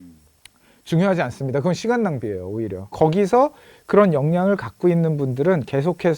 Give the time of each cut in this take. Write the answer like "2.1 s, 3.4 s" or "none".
2.9 s